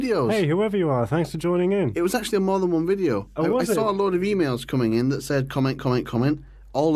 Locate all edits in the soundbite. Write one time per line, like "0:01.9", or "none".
none